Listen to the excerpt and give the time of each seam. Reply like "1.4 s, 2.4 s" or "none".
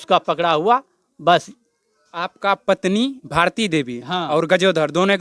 none